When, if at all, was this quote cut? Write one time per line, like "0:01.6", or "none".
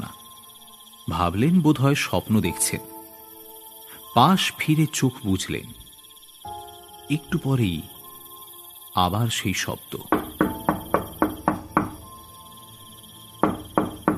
0:09.9